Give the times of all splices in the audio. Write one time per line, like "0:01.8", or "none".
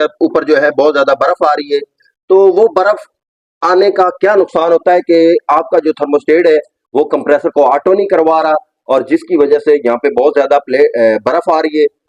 none